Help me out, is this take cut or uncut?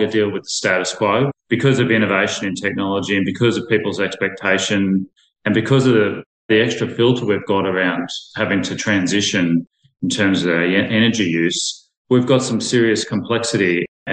cut